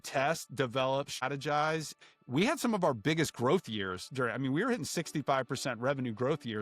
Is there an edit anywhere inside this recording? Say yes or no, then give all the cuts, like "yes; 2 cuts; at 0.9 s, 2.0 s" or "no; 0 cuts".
yes; 2 cuts; at 1.2 s, 2.0 s